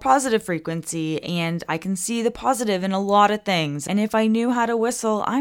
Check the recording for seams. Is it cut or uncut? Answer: cut